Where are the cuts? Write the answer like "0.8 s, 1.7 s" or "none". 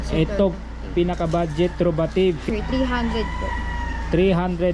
2.4 s